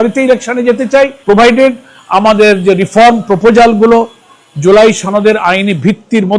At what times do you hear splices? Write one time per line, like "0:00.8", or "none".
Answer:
0:01.2